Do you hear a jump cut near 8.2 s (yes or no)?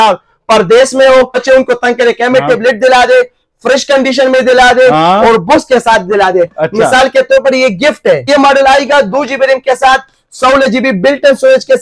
yes